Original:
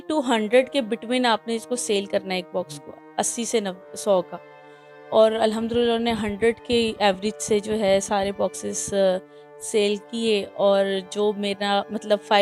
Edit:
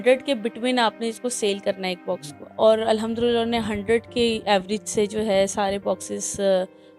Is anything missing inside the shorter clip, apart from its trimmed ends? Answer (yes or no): yes